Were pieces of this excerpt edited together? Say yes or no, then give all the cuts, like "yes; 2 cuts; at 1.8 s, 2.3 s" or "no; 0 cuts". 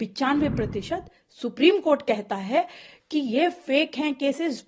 no; 0 cuts